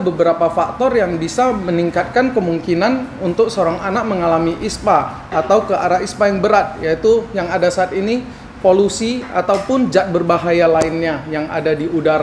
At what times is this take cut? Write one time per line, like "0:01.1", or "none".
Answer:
none